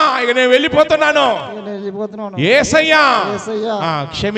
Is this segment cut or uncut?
uncut